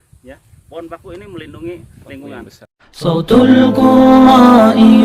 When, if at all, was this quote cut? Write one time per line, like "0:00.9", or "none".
0:02.6